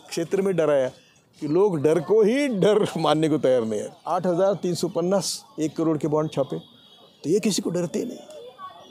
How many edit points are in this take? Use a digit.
1